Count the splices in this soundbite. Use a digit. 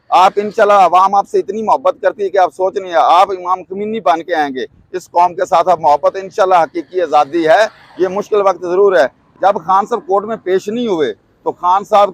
1